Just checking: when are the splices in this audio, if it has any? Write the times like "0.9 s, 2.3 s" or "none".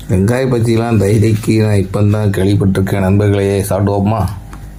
none